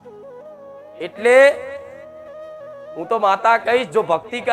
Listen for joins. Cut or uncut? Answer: uncut